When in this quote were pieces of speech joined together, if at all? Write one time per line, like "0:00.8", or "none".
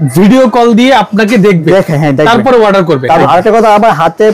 0:03.2

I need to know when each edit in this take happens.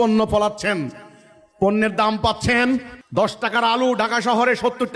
0:03.0

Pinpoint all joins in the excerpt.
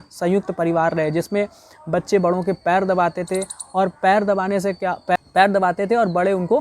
0:05.2

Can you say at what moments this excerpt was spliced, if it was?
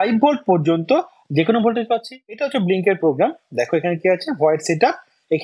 0:02.4

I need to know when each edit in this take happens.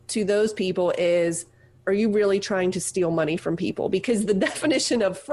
none

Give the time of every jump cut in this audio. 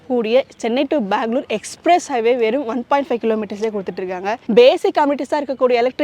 0:04.4

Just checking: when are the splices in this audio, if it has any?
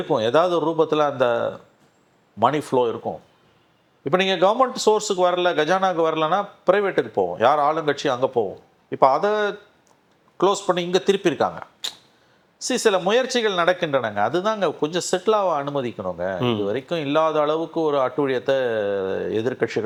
none

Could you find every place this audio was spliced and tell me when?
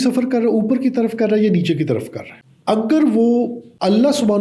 none

